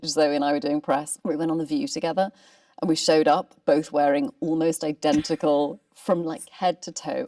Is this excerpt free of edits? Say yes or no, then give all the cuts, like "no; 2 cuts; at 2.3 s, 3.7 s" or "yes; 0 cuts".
no; 1 cut; at 1.1 s